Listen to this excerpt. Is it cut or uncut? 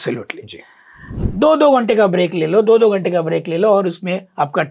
cut